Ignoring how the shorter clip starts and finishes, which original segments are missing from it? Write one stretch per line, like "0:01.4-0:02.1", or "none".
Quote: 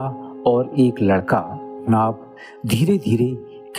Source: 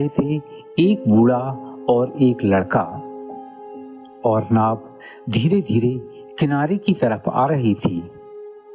0:03.3-0:04.5